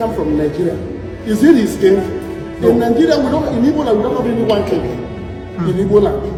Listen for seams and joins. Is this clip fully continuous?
yes; 0 cuts

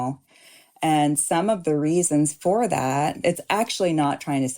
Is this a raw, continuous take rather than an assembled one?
no; 1 cut; at 3.2 s

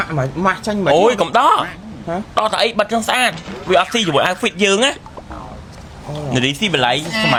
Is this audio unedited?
yes; 0 cuts

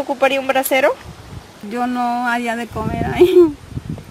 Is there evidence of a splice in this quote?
yes; 1 cut; at 1.5 s

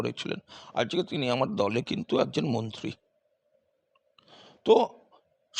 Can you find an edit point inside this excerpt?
no; 0 cuts

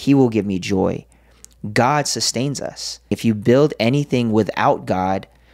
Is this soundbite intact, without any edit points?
no; 1 cut; at 3.2 s

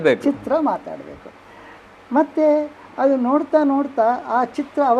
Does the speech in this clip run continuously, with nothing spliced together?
yes; 0 cuts

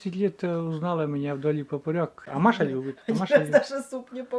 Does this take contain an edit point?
yes; 1 cut; at 2.2 s

